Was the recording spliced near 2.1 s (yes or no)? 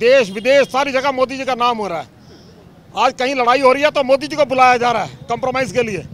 no